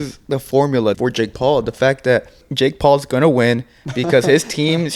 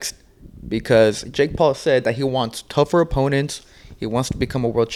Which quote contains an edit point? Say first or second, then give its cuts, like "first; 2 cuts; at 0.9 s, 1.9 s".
first; 2 cuts; at 1.0 s, 2.4 s